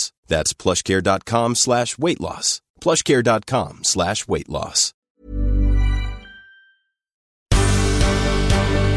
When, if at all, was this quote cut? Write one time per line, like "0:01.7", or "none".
0:05.0
0:07.4